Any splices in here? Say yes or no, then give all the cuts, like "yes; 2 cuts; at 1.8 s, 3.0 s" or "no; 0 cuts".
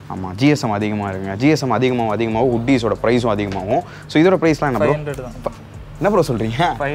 no; 0 cuts